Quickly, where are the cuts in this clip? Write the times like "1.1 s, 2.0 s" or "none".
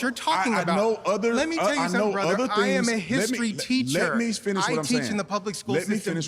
2.3 s

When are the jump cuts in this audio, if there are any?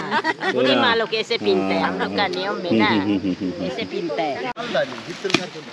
4.5 s

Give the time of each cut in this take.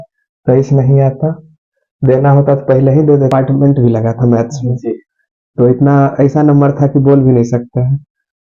3.3 s

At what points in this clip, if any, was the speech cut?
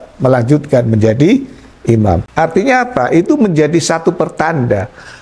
2.3 s

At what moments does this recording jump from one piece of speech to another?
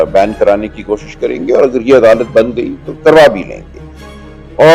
none

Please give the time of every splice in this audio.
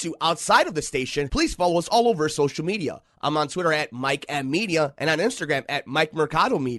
none

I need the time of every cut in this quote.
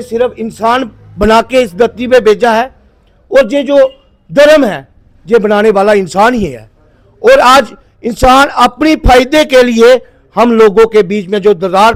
none

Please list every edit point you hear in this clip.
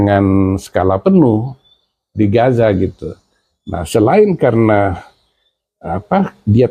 none

